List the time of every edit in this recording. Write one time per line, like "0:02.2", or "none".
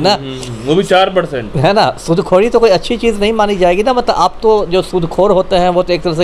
none